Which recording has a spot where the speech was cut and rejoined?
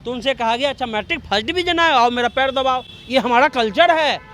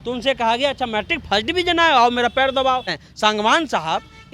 second; 1 cut; at 3.0 s

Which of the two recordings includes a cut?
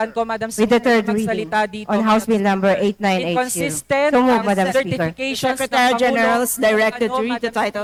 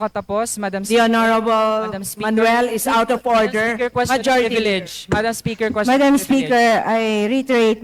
second; 1 cut; at 3.9 s

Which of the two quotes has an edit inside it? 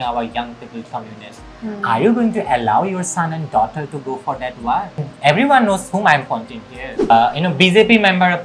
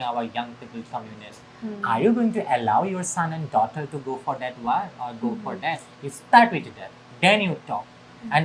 first; 2 cuts; at 5.1 s, 7.1 s

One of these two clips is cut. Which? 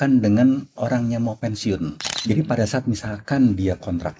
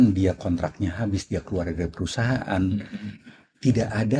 first; 1 cut; at 2.1 s

